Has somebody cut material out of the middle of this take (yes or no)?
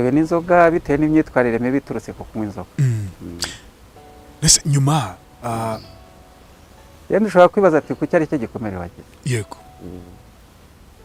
no